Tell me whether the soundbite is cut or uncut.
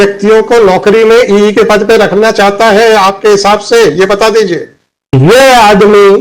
cut